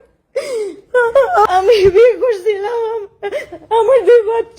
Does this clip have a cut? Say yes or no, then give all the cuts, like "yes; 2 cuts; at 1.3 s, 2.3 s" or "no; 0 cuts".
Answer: yes; 1 cut; at 1.5 s